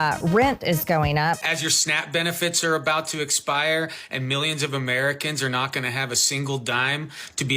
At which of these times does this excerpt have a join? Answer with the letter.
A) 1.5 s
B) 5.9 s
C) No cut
A